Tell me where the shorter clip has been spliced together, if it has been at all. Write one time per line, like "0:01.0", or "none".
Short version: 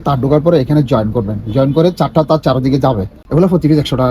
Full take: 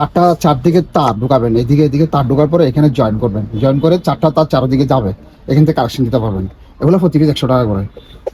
0:03.1

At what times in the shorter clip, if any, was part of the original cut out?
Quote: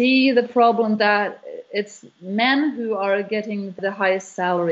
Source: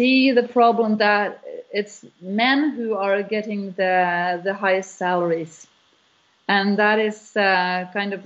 0:03.8

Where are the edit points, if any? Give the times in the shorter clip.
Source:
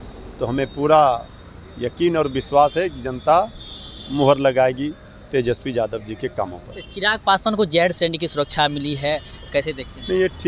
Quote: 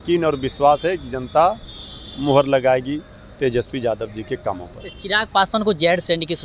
none

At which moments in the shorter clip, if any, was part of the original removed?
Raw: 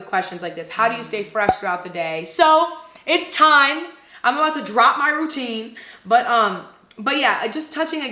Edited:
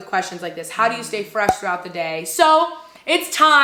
none

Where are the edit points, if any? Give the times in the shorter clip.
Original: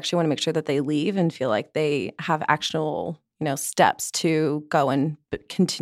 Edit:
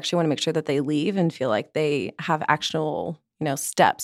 none

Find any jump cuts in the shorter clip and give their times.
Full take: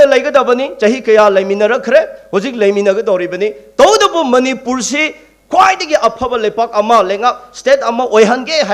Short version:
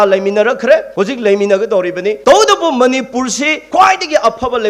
0:00.9
0:02.2
0:03.5

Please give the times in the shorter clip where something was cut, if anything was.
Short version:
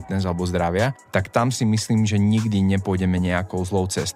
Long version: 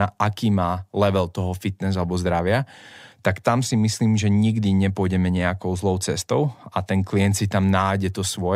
0:01.0

